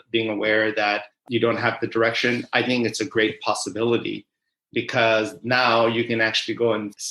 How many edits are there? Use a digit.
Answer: 1